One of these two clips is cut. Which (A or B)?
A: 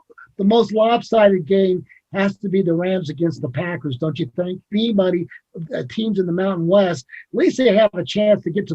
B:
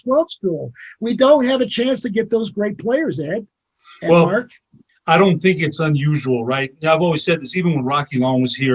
A